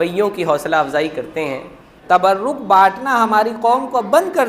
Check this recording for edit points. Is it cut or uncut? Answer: cut